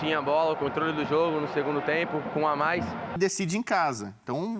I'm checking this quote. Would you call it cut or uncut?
cut